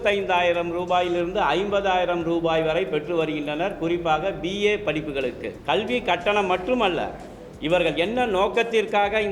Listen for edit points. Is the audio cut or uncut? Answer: cut